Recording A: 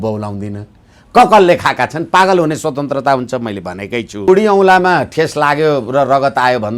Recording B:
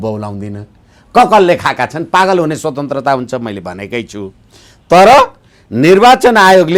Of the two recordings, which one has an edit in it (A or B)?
A